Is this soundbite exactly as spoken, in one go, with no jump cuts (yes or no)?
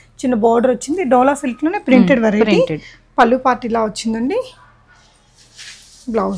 yes